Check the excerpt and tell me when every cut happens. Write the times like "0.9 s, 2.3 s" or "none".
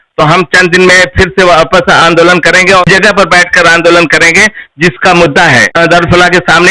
2.8 s, 5.8 s